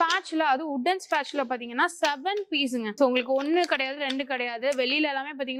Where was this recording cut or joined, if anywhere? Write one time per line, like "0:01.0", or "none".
none